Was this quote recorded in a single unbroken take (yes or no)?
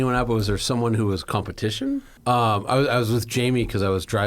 no